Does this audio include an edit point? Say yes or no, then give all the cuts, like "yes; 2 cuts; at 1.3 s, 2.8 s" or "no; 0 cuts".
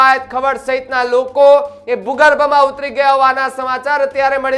no; 0 cuts